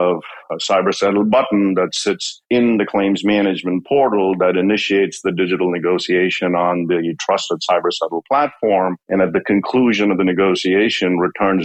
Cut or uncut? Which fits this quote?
uncut